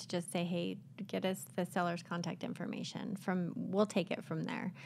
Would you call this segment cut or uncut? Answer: uncut